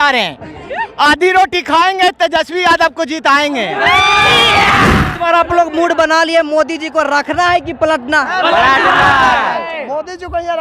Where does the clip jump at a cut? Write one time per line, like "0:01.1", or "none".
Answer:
0:05.1